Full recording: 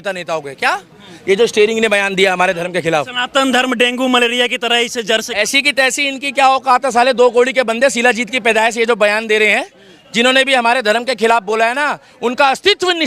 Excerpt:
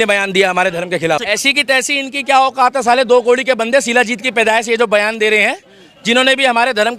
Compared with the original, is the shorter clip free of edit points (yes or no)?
no